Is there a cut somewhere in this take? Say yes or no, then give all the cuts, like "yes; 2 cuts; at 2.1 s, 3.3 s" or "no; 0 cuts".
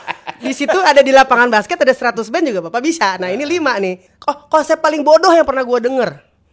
yes; 1 cut; at 4.1 s